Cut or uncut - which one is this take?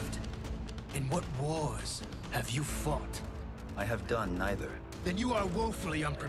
uncut